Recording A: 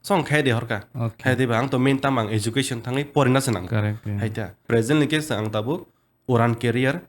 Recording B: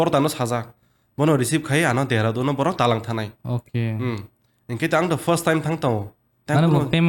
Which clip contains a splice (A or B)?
A